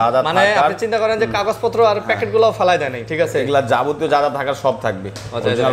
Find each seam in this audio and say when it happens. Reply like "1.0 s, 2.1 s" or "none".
none